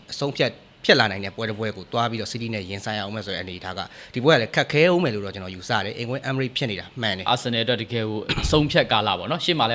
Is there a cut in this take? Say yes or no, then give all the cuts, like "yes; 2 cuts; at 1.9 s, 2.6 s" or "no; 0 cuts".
yes; 1 cut; at 7.3 s